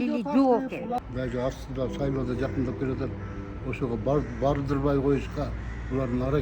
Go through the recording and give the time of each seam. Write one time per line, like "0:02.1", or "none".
0:01.0